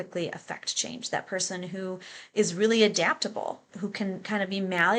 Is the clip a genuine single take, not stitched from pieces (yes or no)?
no